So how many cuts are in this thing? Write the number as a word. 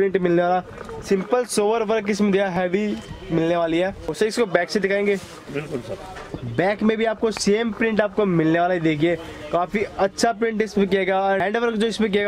zero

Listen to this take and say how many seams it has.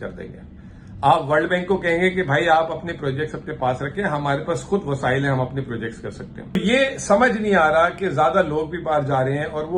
one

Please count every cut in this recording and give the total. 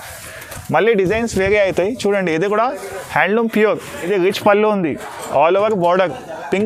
zero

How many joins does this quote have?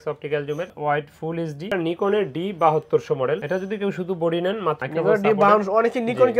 two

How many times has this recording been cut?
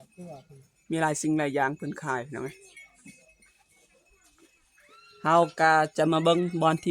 zero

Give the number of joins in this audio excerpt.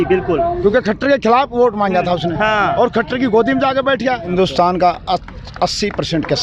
one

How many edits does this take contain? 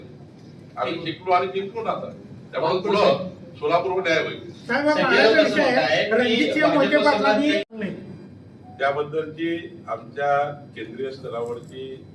zero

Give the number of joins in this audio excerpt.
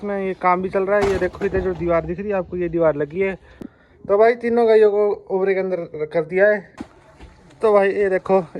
two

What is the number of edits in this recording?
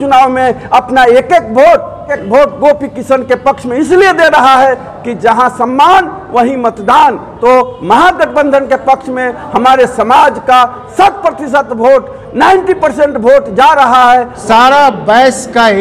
three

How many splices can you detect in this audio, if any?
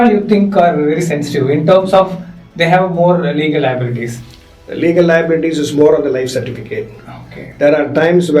zero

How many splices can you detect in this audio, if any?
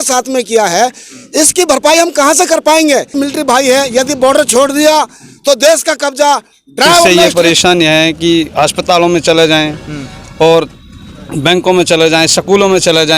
two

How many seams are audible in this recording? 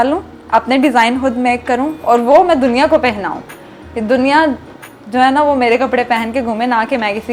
zero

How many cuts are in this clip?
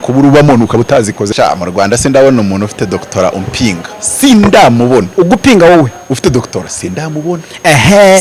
one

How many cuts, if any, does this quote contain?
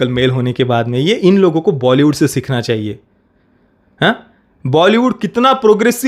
zero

